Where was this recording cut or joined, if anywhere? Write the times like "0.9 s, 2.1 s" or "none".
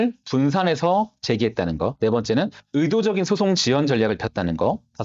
1.9 s